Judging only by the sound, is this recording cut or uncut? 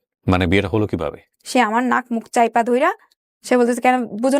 cut